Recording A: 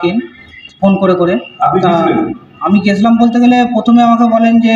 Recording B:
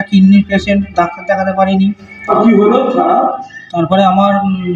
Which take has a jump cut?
B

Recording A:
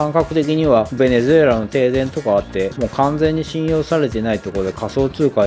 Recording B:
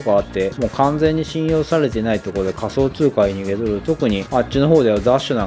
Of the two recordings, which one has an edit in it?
B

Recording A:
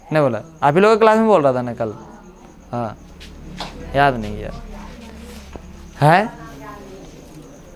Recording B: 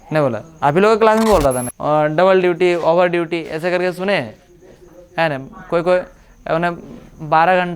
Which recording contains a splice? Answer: B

